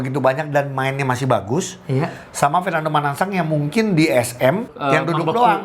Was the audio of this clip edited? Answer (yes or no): yes